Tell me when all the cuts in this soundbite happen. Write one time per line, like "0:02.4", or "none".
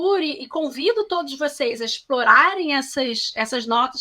none